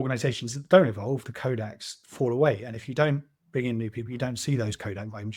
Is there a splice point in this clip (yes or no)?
no